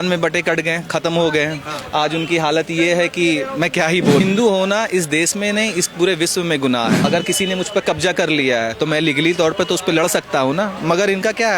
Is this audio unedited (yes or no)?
no